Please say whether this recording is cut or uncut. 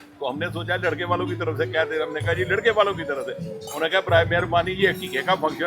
uncut